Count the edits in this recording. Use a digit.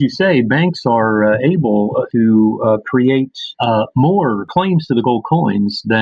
3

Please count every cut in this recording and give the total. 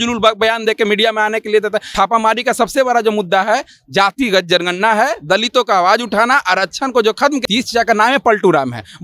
2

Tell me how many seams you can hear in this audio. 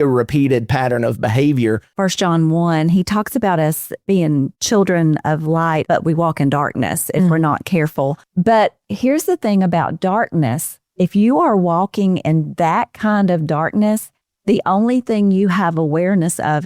4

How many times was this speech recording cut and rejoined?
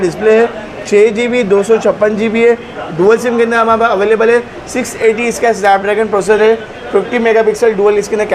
0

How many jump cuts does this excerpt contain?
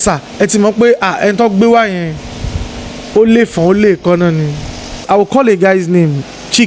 1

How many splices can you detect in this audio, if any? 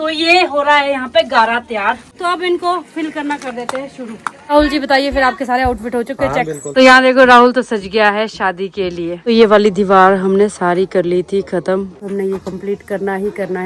5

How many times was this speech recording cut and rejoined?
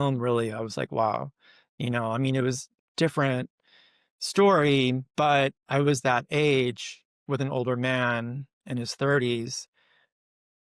0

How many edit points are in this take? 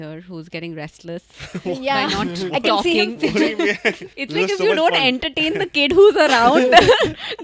1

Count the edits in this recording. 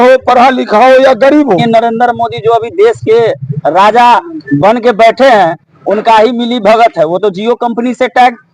1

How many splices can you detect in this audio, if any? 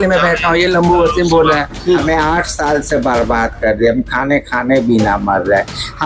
1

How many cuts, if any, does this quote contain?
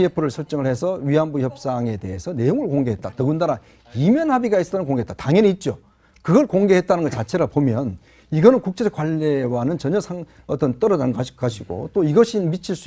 1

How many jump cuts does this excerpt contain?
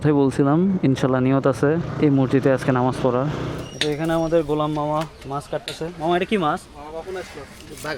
2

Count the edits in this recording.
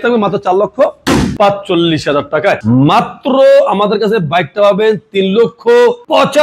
2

